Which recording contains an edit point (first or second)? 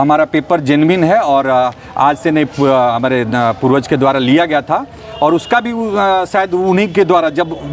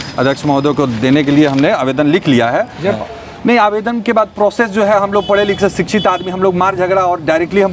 second